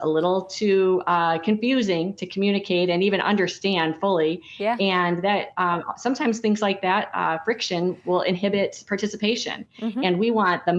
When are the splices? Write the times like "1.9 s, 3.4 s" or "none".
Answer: none

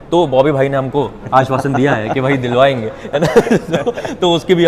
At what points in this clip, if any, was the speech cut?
none

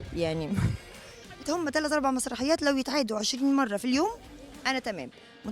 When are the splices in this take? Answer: 1.4 s

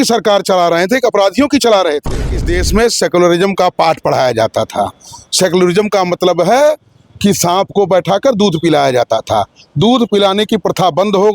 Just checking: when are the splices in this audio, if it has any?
2.4 s

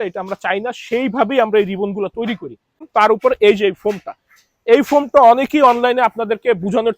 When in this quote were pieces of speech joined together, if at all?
2.9 s

